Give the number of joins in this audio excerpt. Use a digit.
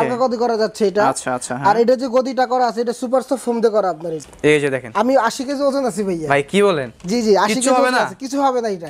1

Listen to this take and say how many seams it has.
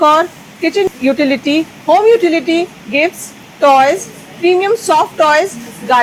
0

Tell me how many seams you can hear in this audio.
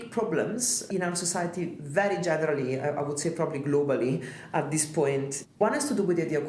2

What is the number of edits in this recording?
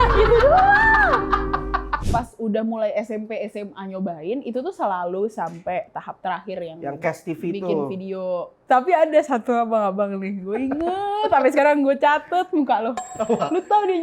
2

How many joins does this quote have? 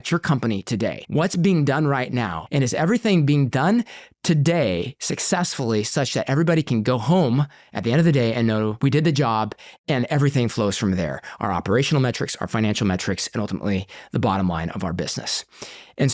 3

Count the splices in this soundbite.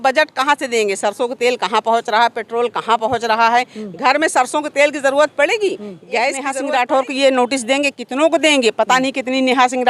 1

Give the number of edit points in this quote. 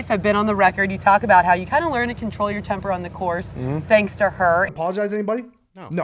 1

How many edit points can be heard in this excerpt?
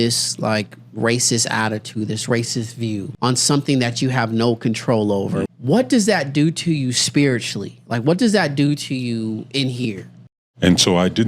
3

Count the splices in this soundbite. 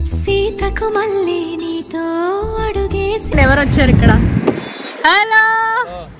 1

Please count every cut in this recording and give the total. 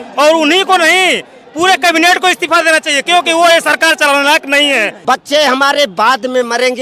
1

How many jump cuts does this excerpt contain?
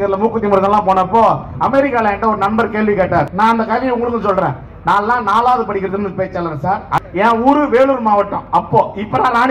2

